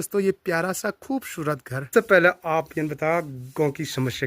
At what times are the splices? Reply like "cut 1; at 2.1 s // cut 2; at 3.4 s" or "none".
cut 1; at 1.9 s